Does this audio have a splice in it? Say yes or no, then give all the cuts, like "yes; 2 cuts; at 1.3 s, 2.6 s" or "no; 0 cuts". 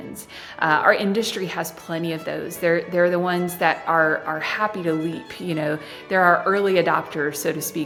no; 0 cuts